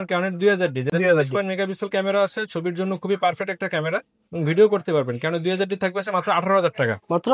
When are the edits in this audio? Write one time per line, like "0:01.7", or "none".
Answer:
none